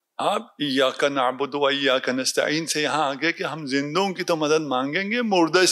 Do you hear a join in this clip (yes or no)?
no